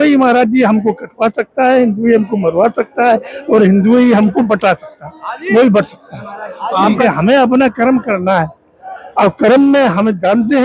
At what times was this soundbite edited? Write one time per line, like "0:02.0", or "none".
0:07.0

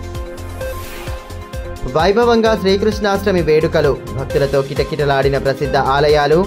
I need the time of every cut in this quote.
none

